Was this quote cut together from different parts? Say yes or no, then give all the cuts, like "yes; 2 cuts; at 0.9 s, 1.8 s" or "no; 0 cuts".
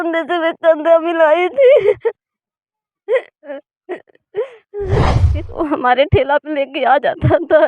yes; 1 cut; at 5.2 s